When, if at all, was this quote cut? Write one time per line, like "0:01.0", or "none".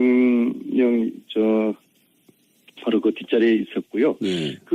0:02.9